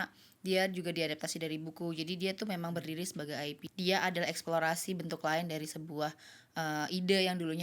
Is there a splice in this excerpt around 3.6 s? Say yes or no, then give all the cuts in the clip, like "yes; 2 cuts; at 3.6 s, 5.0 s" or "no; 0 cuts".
yes; 1 cut; at 3.6 s